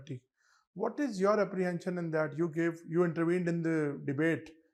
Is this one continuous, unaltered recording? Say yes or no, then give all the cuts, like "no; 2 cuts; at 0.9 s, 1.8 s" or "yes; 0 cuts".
yes; 0 cuts